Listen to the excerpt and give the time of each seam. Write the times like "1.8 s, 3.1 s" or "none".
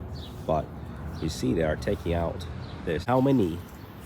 3.0 s